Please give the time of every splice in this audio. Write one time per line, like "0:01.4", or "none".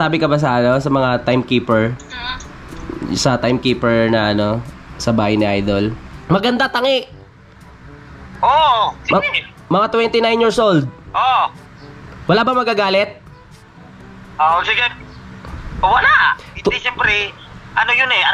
0:06.1

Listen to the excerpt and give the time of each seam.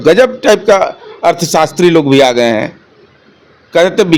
none

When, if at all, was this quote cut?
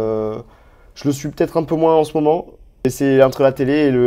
0:02.9

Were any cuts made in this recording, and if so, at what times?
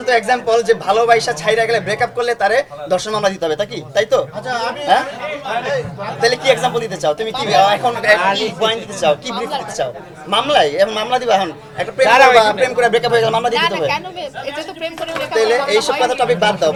none

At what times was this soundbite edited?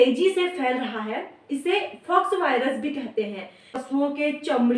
0:03.8

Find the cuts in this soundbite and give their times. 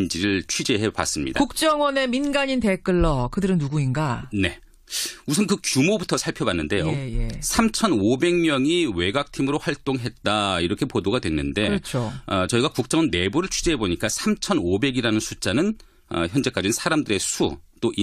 none

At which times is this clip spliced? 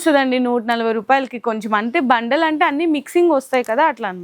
none

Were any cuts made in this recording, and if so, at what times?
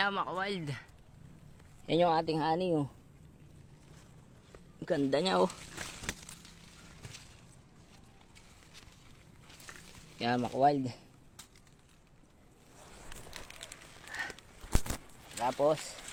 none

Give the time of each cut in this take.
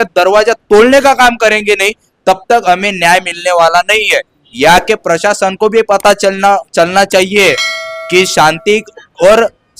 none

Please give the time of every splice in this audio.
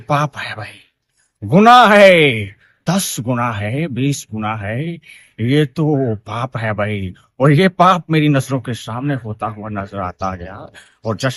none

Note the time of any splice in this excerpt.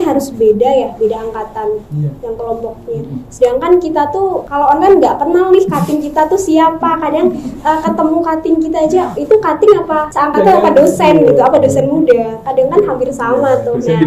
0:04.4
0:10.1

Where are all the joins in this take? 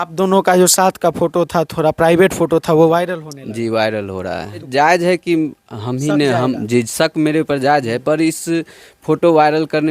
0:04.6

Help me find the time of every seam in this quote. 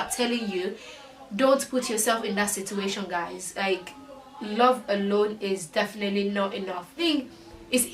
0:07.0

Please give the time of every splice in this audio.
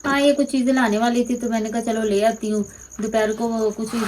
none

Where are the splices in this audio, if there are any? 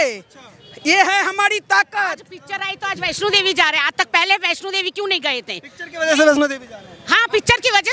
none

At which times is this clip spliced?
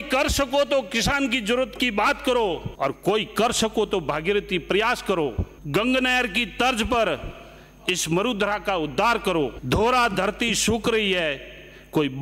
none

